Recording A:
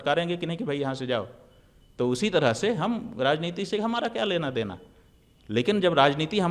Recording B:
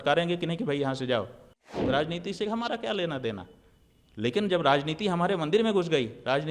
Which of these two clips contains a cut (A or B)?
B